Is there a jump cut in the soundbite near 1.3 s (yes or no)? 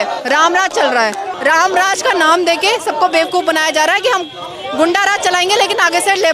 yes